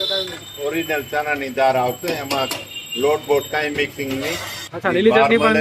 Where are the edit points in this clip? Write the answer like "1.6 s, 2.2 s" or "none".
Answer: 4.5 s